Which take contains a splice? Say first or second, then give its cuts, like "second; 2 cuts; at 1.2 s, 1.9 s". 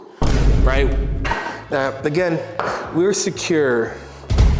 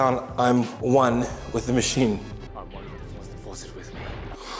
first; 1 cut; at 1.5 s